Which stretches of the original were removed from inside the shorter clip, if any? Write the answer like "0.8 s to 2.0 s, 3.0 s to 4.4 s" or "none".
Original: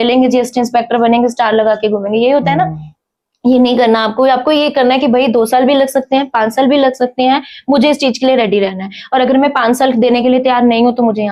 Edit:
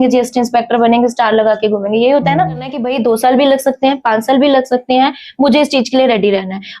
3.0 s to 5.1 s